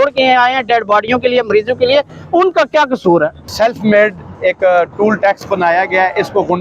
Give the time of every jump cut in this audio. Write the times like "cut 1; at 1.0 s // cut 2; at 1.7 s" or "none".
cut 1; at 3.4 s

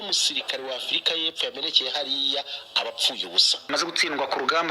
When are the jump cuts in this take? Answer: cut 1; at 3.7 s

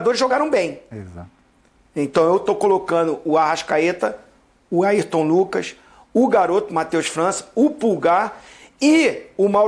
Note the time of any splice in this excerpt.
none

